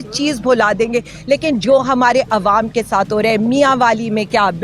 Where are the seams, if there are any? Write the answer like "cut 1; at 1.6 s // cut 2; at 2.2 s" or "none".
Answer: none

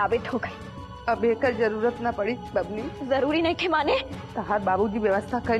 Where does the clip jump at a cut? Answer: cut 1; at 2.9 s // cut 2; at 4.2 s

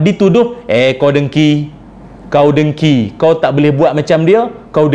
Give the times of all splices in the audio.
none

